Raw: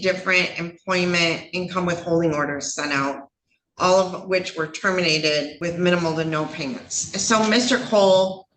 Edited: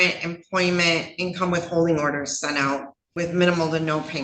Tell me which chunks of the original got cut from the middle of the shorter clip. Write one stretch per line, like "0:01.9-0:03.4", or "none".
0:03.4-0:05.5